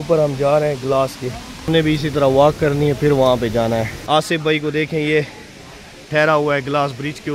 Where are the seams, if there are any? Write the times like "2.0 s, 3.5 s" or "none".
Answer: 1.7 s, 4.0 s

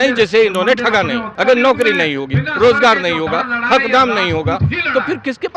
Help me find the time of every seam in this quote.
1.3 s

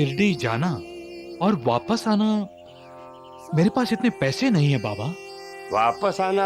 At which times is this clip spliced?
none

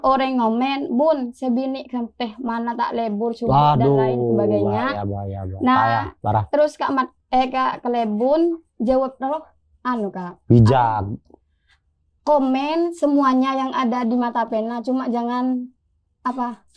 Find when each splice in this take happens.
none

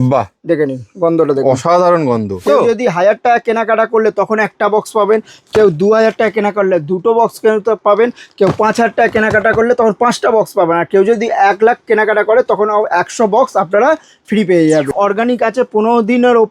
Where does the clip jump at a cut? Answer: 2.4 s, 14.9 s

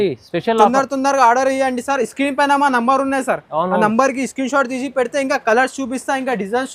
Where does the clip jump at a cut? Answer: none

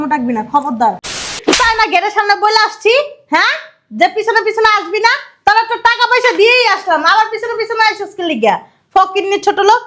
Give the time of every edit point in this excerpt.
1.4 s

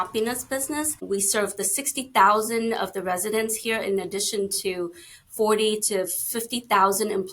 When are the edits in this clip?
1.0 s

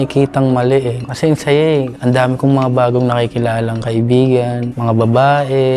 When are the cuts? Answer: 1.0 s, 1.9 s, 4.7 s

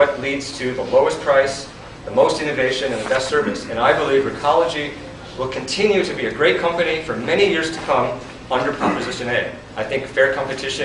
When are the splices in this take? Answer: none

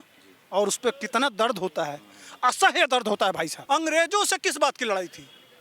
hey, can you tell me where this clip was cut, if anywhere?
3.6 s

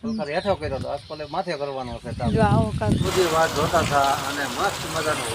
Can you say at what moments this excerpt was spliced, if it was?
3.0 s

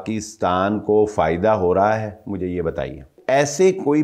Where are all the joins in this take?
3.1 s

